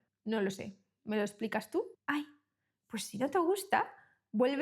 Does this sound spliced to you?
yes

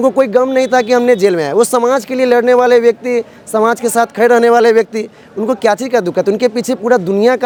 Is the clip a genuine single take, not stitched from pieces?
yes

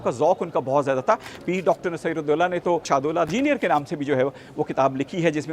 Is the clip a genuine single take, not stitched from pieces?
no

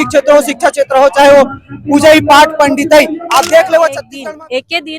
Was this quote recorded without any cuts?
no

